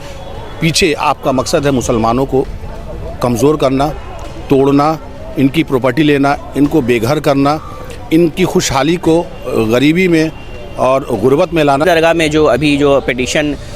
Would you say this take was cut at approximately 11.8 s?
yes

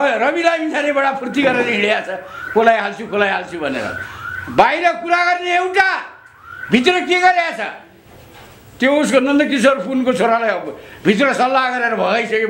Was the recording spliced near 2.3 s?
no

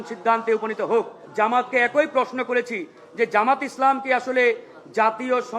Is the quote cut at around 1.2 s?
yes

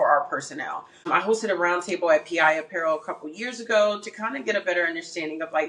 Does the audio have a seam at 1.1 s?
yes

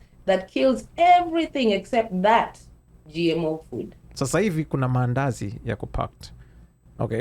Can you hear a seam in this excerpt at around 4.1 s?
yes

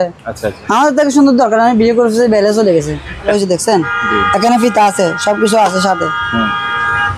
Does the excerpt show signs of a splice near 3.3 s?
yes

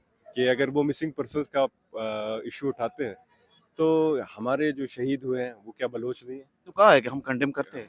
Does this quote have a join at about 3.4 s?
no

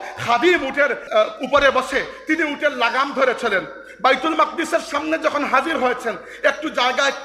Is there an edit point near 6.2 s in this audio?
no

